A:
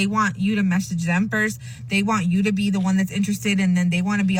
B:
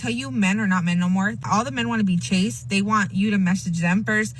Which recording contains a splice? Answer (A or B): B